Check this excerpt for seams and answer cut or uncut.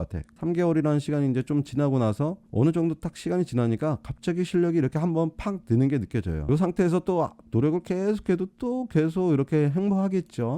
cut